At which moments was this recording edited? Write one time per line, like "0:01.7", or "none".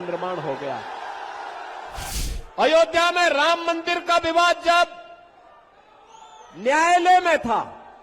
0:02.1